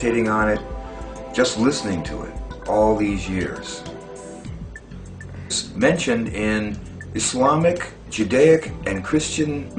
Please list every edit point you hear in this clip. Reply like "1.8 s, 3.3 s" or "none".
none